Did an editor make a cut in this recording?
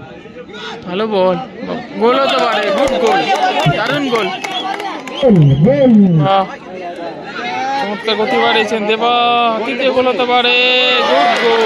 yes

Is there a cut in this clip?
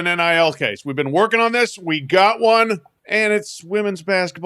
yes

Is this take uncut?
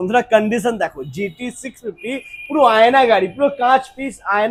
yes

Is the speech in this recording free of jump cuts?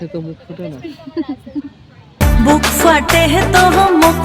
no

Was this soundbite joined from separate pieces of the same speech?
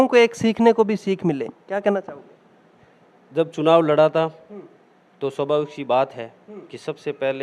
no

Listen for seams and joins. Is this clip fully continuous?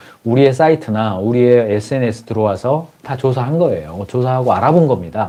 yes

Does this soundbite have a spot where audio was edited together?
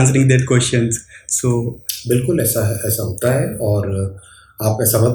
no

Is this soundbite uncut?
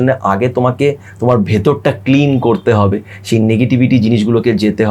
yes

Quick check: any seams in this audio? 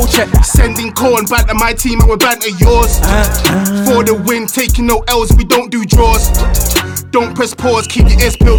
no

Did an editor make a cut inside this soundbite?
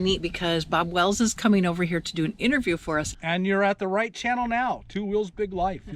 yes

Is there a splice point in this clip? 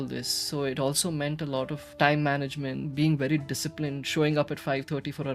yes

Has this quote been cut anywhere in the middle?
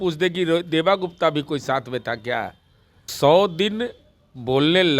yes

